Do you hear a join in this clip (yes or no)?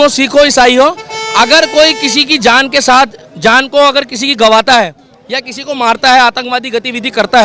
no